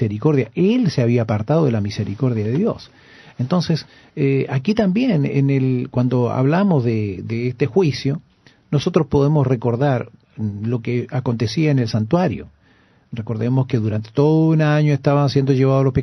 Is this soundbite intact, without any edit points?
no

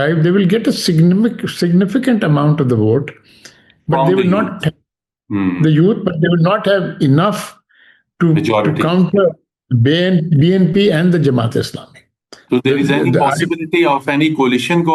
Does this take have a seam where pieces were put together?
no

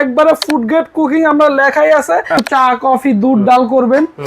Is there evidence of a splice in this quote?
yes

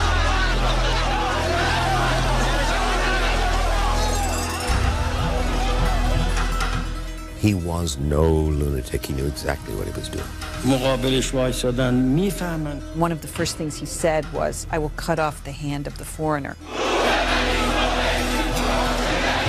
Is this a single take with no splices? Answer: yes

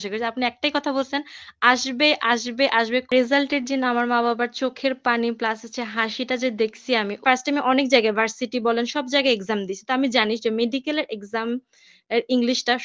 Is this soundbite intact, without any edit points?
no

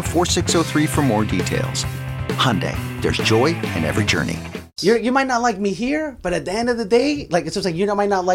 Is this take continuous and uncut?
no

